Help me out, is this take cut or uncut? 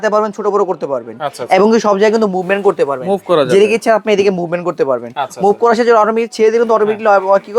uncut